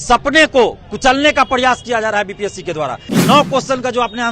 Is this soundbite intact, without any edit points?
no; 1 cut; at 3.1 s

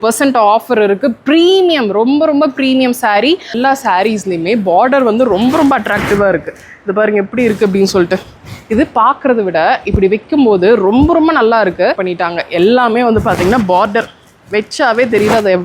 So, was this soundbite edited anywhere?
yes; 2 cuts; at 3.5 s, 12.0 s

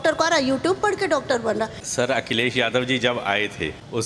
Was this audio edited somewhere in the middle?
yes; 1 cut; at 1.8 s

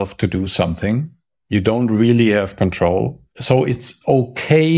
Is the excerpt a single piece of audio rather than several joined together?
no; 1 cut; at 3.8 s

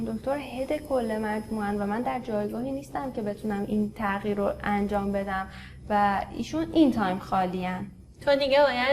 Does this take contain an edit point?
no; 0 cuts

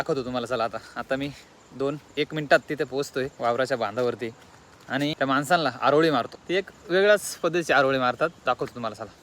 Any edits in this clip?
yes; 4 cuts; at 0.9 s, 3.3 s, 5.1 s, 6.4 s

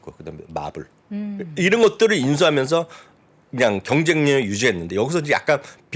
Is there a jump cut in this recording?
no; 0 cuts

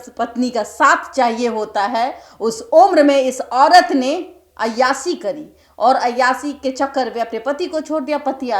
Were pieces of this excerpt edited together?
no; 0 cuts

